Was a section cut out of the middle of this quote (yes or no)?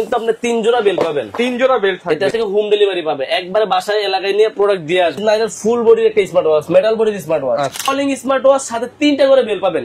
yes